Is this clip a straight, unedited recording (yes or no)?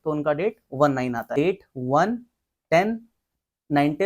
no